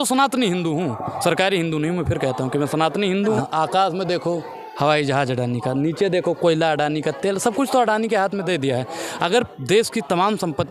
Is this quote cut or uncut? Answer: cut